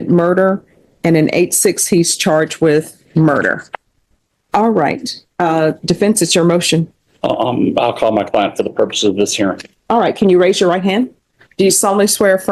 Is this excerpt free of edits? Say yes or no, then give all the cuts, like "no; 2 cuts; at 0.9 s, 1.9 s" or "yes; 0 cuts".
yes; 0 cuts